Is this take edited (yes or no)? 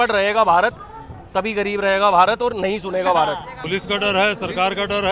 yes